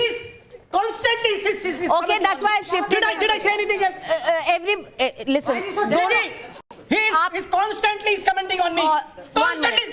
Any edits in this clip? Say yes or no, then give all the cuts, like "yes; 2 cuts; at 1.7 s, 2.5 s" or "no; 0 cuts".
no; 0 cuts